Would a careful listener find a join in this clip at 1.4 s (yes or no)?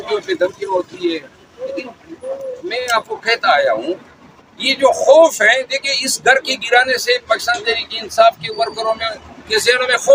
no